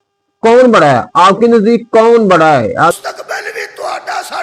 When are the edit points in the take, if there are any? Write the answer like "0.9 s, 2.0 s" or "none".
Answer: 2.9 s